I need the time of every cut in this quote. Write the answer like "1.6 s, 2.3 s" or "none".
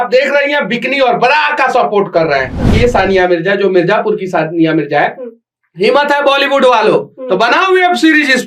2.7 s